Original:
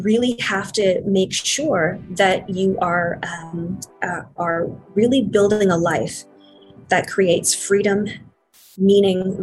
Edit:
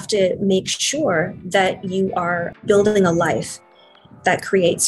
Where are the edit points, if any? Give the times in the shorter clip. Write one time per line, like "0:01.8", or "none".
0:02.6